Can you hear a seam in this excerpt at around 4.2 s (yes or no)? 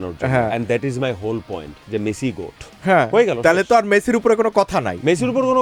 no